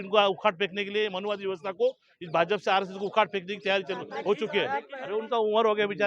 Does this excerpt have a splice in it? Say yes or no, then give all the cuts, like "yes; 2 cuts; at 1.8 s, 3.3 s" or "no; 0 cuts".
yes; 1 cut; at 5.0 s